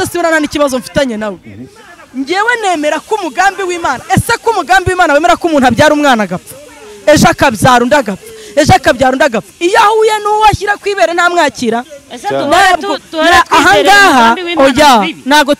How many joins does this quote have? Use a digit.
0